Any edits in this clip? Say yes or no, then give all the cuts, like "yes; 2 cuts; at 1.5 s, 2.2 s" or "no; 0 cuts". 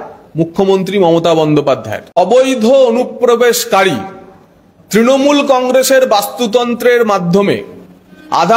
yes; 1 cut; at 2.2 s